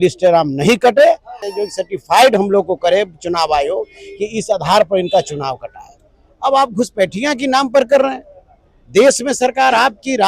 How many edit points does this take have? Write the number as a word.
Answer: one